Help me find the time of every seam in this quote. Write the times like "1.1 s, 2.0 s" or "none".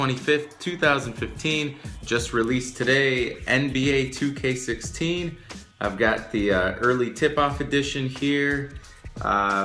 none